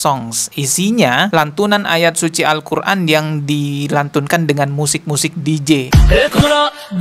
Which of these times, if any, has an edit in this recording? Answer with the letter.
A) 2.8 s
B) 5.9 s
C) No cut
B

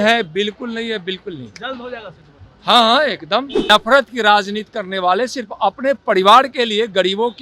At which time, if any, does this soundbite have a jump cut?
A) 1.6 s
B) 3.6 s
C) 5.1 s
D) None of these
B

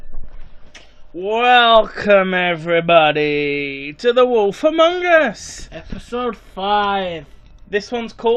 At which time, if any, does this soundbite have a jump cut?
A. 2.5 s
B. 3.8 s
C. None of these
C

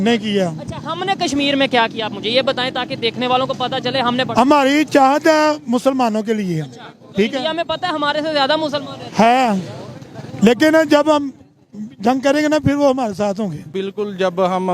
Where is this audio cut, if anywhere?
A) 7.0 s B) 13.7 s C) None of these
B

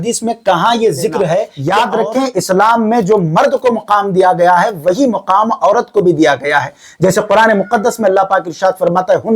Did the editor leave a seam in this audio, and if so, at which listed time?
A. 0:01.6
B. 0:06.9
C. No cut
A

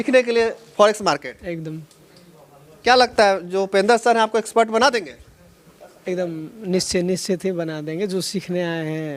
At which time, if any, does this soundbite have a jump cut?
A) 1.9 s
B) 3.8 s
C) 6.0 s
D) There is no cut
D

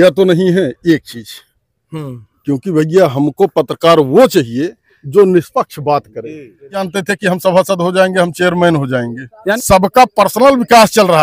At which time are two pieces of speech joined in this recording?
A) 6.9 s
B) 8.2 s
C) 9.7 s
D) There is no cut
A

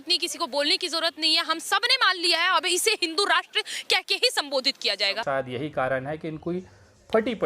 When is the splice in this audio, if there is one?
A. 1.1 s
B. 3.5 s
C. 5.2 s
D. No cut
C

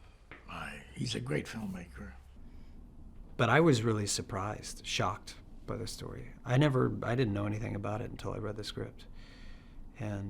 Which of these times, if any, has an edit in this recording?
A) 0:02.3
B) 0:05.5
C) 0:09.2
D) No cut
A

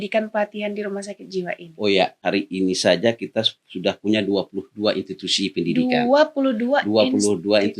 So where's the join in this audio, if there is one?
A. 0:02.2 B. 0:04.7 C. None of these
A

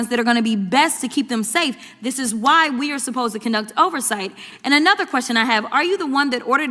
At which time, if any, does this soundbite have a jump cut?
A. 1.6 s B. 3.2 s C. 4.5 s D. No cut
C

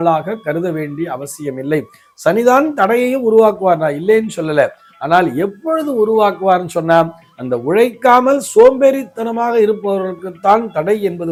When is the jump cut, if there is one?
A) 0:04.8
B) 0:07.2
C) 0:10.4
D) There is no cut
D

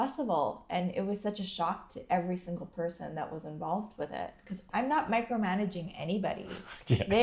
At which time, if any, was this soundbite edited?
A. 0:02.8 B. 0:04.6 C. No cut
B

